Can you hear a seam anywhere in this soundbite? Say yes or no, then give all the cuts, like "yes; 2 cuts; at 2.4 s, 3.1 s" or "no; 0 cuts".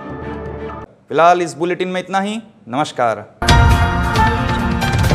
no; 0 cuts